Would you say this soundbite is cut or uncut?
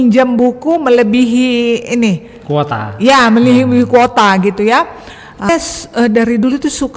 cut